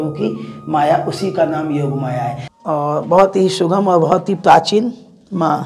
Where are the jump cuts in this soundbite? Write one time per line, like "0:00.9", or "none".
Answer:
0:02.4